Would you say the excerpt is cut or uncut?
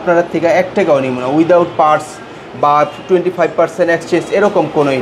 uncut